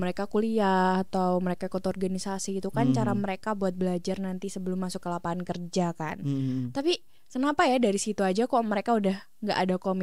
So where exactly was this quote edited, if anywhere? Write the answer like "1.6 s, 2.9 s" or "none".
none